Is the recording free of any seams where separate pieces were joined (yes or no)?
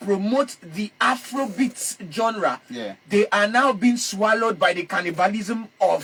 yes